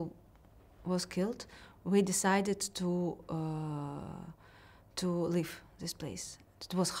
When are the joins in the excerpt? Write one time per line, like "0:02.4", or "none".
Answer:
none